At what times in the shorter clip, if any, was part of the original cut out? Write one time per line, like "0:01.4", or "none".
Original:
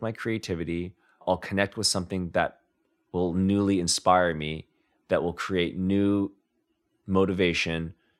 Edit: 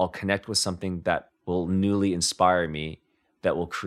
0:01.3